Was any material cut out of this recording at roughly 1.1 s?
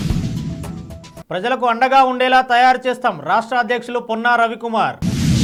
no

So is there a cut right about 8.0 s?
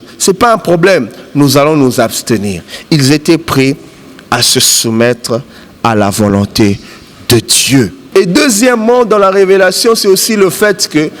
yes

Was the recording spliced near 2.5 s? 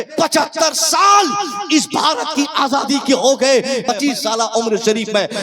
no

